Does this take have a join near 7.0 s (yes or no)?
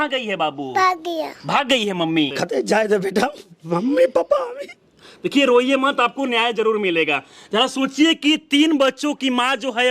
no